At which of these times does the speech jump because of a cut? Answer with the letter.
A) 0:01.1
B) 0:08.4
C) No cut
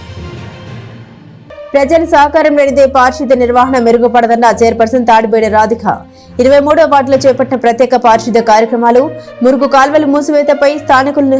C